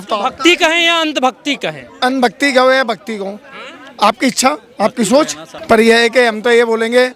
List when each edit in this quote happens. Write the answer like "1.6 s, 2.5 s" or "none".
5.5 s